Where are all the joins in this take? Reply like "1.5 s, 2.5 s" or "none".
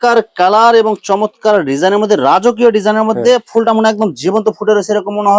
none